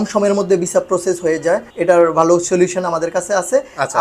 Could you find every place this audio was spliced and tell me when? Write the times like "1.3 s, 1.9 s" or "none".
1.7 s